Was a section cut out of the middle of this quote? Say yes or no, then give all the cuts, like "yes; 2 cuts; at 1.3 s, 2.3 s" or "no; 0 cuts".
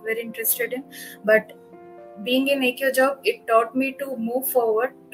no; 0 cuts